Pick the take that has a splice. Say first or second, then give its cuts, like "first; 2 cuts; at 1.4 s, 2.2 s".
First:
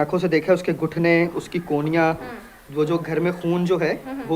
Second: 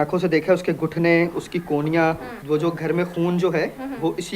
second; 1 cut; at 2.3 s